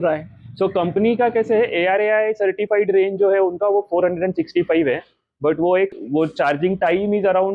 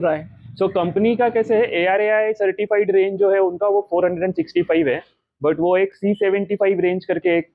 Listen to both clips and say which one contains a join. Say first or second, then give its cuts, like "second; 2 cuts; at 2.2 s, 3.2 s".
first; 1 cut; at 6.0 s